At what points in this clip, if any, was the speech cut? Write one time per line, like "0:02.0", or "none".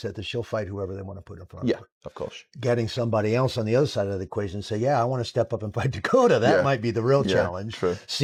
none